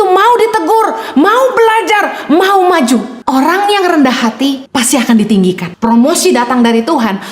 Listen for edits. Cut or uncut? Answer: cut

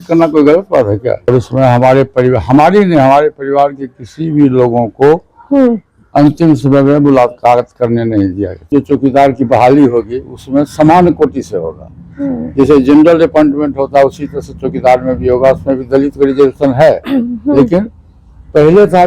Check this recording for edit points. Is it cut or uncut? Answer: cut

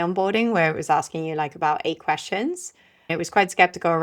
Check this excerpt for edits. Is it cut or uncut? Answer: cut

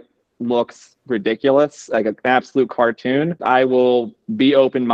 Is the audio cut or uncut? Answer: cut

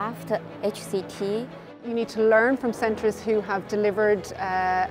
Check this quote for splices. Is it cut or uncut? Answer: cut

